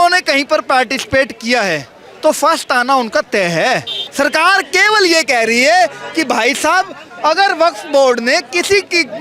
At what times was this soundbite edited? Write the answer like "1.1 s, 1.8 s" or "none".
4.0 s